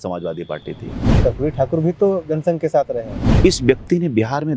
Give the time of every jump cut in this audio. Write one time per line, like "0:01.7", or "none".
0:01.1
0:03.2